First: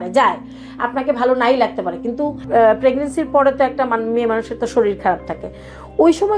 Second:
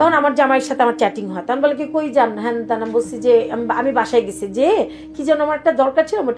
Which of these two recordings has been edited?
first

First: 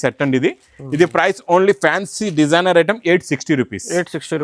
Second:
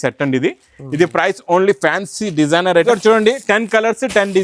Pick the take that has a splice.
second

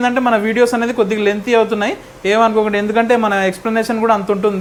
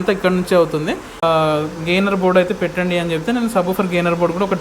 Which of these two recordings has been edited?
second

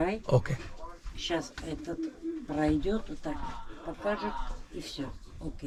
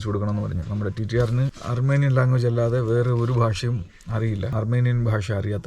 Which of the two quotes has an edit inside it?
second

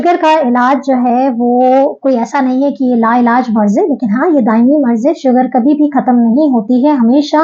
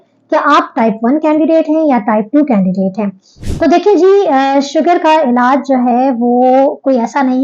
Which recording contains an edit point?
second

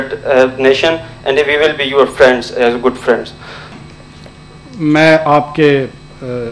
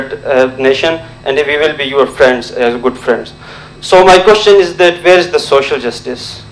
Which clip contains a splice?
first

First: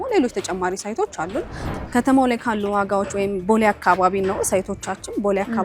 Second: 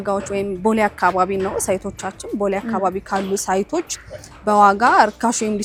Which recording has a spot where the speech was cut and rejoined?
first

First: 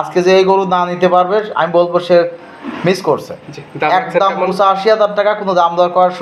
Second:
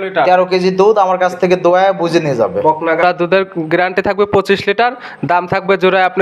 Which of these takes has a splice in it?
second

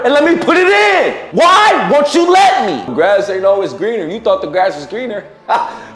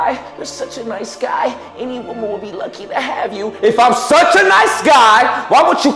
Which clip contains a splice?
first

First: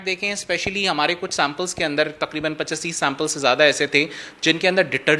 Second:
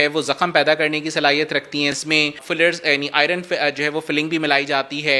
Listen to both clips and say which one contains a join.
second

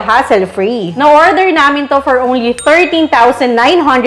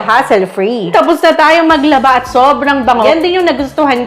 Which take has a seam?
second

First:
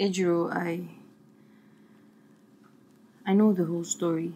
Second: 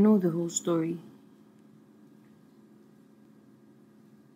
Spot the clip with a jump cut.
second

